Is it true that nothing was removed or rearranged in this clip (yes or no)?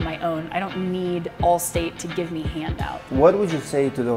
no